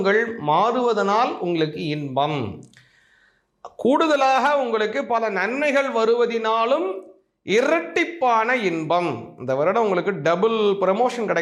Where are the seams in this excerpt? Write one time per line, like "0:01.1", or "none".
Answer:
none